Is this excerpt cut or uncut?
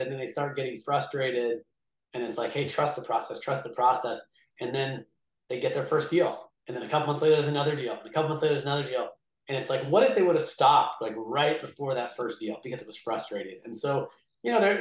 uncut